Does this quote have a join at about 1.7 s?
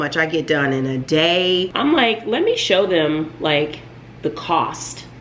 yes; 1 cut; at 1.7 s

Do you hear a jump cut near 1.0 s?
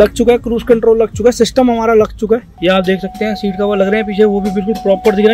no; 1 cut; at 2.5 s

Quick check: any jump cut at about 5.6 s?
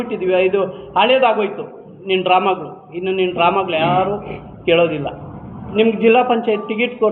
yes; 1 cut; at 5.6 s

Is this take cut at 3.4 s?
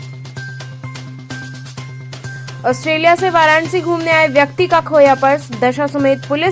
no; 2 cuts; at 1.2 s, 2.2 s

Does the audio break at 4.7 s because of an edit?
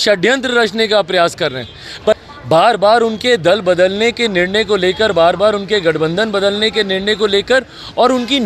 no; 1 cut; at 2.2 s

